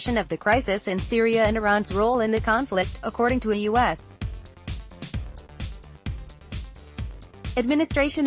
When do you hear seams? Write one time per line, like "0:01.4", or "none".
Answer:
0:04.1
0:06.9